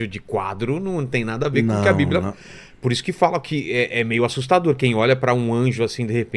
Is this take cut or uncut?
uncut